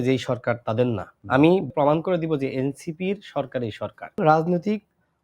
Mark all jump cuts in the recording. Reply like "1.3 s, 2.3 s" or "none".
1.1 s, 1.7 s, 4.2 s